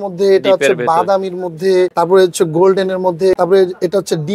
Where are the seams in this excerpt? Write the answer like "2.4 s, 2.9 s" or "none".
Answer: 1.9 s, 3.3 s